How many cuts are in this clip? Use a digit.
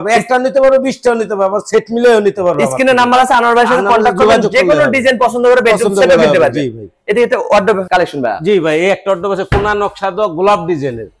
0